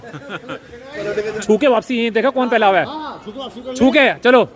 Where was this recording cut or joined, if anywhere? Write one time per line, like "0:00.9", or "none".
0:01.3